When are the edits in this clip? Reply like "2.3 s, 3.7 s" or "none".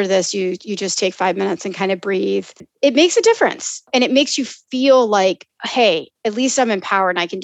2.7 s, 3.9 s